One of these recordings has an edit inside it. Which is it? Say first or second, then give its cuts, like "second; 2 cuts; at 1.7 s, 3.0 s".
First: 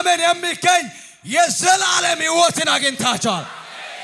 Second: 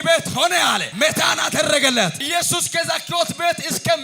second; 2 cuts; at 0.9 s, 2.2 s